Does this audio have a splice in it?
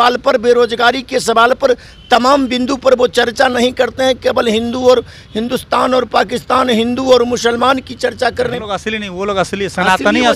yes; 1 cut; at 8.6 s

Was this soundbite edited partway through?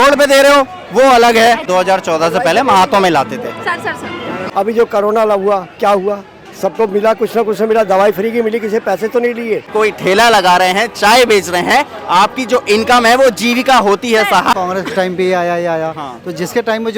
yes; 4 cuts; at 1.6 s, 4.4 s, 9.7 s, 14.5 s

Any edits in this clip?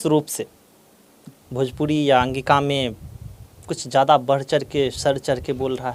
no; 0 cuts

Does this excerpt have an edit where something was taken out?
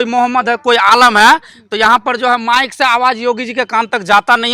no; 0 cuts

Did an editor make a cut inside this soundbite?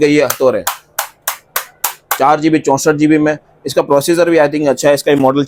no; 0 cuts

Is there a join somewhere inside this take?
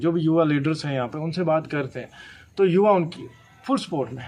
no; 0 cuts

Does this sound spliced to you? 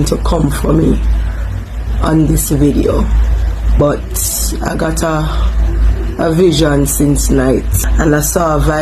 yes; 2 cuts; at 3.8 s, 7.8 s

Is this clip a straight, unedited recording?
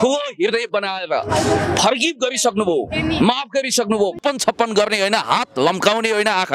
no; 1 cut; at 4.2 s

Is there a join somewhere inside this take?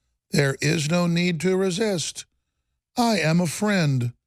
no; 0 cuts

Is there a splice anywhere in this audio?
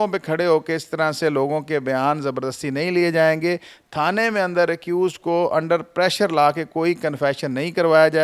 no; 0 cuts

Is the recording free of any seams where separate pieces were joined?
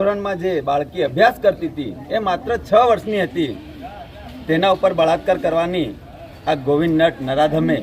yes; 0 cuts

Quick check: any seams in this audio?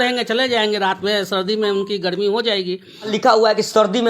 yes; 1 cut; at 3.1 s

